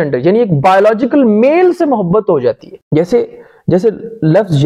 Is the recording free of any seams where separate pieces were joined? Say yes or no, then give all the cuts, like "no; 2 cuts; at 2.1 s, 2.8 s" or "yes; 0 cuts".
no; 1 cut; at 2.7 s